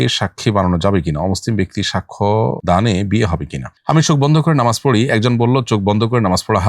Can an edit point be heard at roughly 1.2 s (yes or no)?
no